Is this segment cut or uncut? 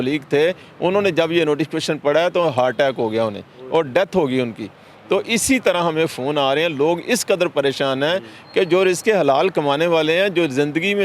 uncut